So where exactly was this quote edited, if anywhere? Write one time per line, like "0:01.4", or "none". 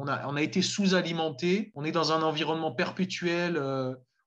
0:01.7

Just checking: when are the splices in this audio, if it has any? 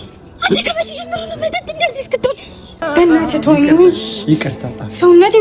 0:02.9

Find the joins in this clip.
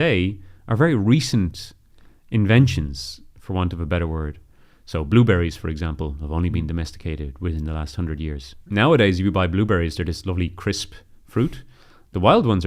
0:08.5

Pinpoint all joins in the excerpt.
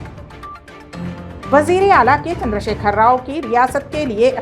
0:01.5

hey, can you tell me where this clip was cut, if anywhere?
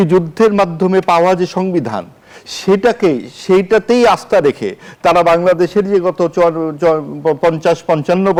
none

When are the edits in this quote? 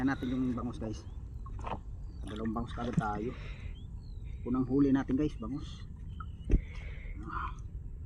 none

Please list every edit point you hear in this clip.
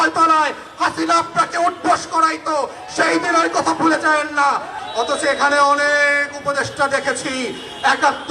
0:04.8

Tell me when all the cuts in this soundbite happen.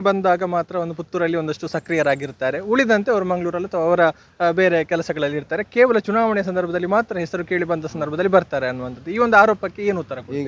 none

